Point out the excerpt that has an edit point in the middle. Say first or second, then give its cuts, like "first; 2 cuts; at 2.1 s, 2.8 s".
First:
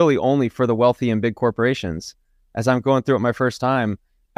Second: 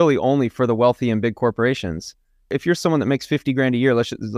second; 1 cut; at 2.5 s